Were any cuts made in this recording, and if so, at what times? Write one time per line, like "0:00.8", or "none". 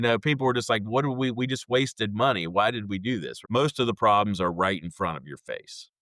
0:03.3